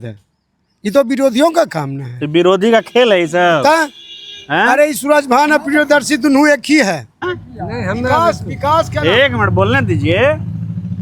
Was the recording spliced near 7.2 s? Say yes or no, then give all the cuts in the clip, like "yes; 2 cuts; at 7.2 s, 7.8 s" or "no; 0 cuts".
yes; 1 cut; at 7.2 s